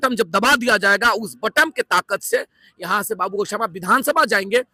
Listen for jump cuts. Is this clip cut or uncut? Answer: uncut